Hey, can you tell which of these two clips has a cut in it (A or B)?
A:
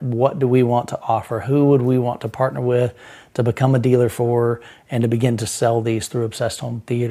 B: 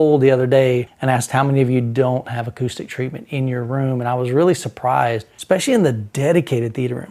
B